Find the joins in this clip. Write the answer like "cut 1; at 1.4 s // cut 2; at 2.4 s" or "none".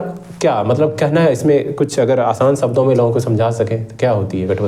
none